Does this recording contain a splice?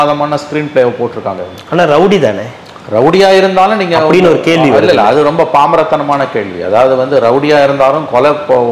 no; 0 cuts

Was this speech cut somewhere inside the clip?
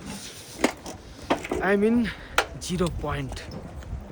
no; 0 cuts

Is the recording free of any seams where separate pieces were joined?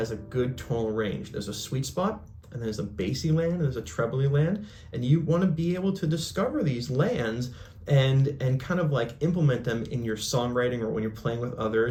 yes; 0 cuts

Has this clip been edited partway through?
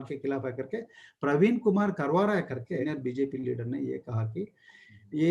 yes; 1 cut; at 2.6 s

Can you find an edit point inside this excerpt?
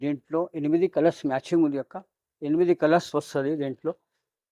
no; 0 cuts

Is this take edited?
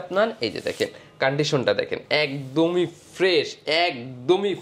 no; 0 cuts

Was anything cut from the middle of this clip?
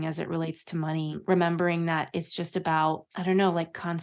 no; 0 cuts

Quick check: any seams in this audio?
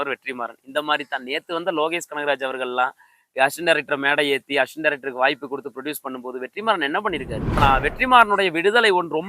yes; 1 cut; at 7.6 s

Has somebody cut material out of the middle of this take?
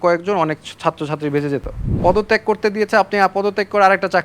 yes; 1 cut; at 1.8 s

